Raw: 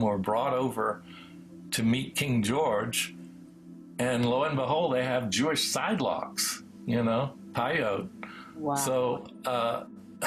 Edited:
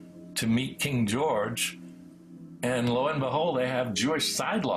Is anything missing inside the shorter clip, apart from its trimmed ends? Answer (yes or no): no